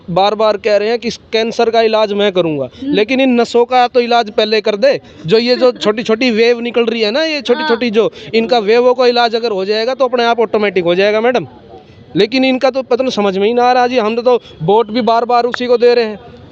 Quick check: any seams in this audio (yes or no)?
no